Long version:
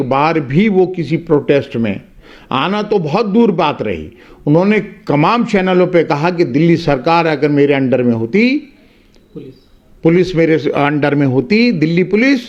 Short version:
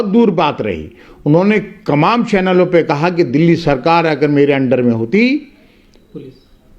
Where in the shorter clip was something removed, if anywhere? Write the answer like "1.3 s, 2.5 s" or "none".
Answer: none